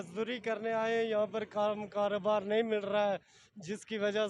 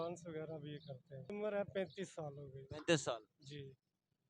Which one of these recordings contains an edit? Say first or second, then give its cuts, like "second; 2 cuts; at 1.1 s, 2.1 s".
second; 1 cut; at 1.3 s